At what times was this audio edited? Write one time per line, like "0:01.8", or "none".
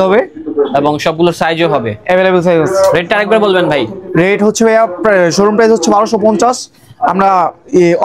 none